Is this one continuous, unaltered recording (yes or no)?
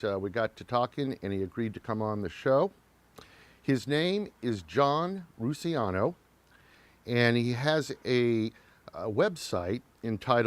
no